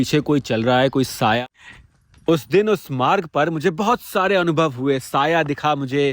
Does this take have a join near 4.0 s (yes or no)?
no